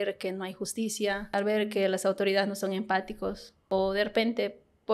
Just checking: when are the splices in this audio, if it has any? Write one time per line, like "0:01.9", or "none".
0:01.3
0:03.5